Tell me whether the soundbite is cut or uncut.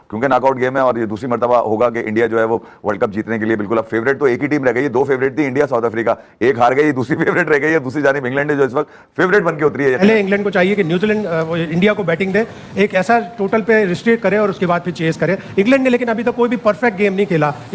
cut